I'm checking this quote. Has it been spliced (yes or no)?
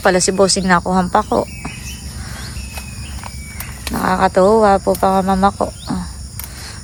no